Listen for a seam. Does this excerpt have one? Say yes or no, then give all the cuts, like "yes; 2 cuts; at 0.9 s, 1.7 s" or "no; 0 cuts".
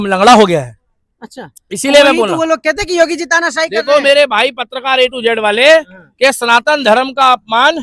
no; 0 cuts